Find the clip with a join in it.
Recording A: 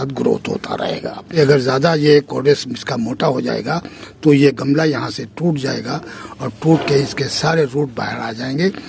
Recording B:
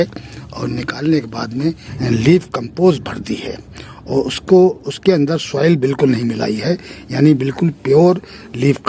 A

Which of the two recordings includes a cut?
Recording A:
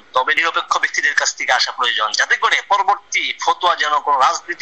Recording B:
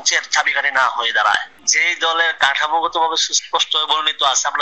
B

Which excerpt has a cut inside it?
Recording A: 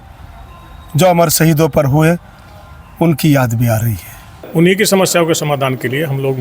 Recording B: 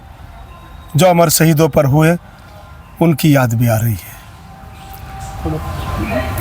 A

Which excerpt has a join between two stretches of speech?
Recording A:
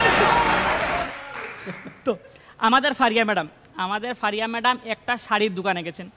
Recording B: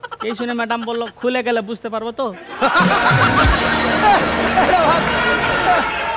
A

